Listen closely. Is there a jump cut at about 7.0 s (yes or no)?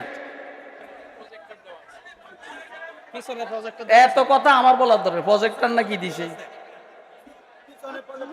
no